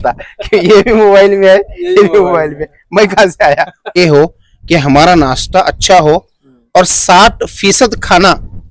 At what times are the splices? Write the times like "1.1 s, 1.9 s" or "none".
4.0 s